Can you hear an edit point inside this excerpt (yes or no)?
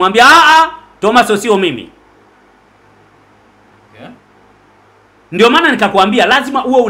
no